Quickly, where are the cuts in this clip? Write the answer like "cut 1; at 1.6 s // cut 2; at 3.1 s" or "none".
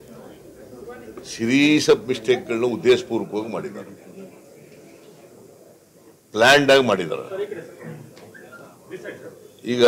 cut 1; at 7.4 s